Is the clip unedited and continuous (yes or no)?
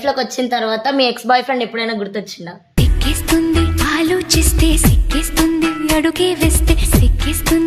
yes